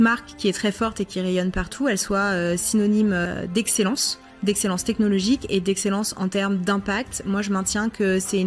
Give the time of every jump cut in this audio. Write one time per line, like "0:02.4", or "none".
0:03.2